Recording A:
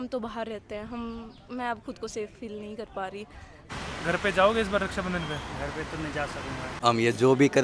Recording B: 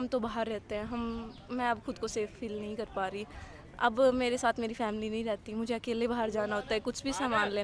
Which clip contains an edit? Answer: A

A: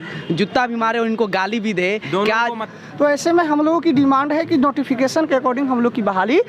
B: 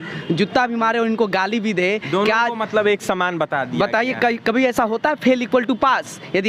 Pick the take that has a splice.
A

